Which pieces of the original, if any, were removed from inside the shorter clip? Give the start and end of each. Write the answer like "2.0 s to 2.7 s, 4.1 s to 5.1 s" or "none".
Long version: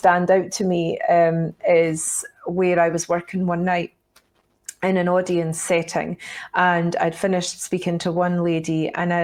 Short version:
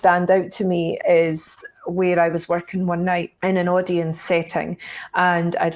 1.0 s to 1.6 s, 3.9 s to 4.7 s

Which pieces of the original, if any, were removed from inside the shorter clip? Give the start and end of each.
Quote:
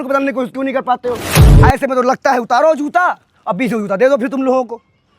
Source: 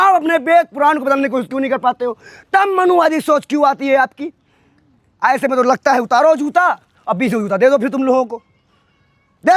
2.3 s to 5.0 s

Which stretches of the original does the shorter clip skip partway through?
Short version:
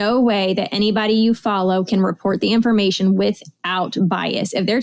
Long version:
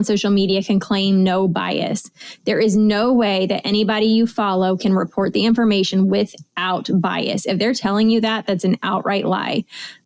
none

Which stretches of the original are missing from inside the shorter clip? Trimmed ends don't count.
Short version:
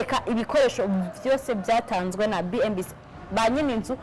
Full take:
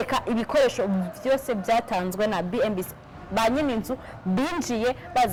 none

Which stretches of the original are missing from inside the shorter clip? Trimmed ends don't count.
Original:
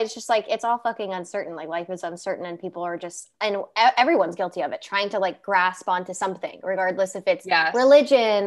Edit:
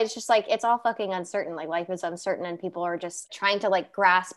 3.3 s to 4.8 s

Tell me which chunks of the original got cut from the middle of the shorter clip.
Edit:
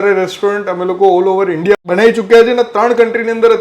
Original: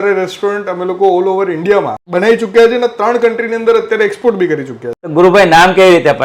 1.8 s to 2.0 s

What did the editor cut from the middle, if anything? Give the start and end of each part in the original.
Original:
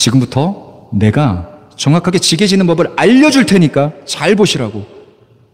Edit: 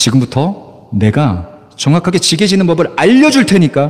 none

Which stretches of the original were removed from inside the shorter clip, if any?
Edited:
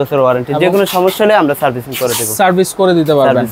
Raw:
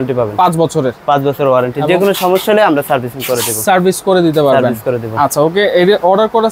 none

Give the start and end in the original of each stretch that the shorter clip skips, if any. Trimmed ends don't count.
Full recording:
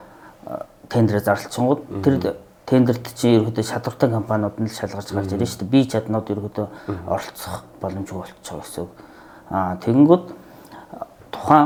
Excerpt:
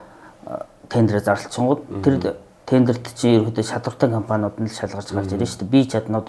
none

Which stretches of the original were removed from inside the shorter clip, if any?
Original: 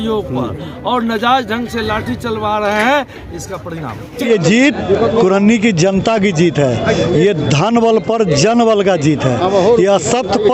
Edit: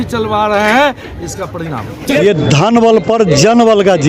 4.3 s to 7.2 s

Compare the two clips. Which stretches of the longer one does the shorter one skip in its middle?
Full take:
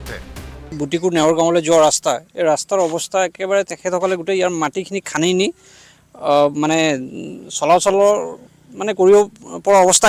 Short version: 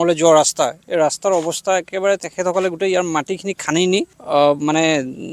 5.6 s to 6.1 s

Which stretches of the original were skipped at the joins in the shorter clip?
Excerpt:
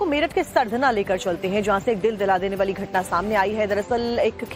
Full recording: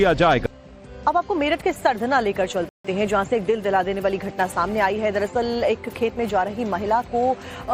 2.7 s to 2.9 s

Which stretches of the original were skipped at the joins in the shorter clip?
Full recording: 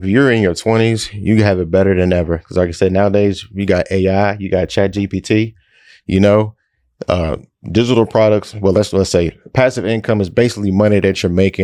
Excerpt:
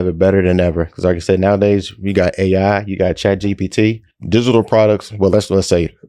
5.6 s to 7.5 s

